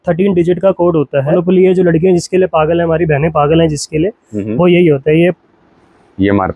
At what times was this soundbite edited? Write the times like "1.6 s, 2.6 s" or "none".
1.4 s, 5.4 s